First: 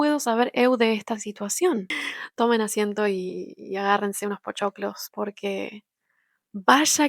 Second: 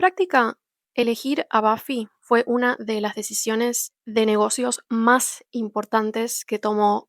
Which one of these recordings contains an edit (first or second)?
first